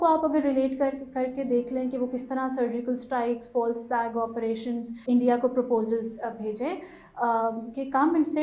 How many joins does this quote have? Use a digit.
1